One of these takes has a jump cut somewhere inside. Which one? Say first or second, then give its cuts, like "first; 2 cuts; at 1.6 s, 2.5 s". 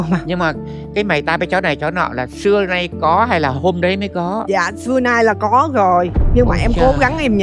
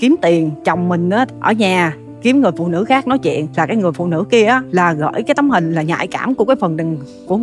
second; 3 cuts; at 1.0 s, 3.5 s, 4.7 s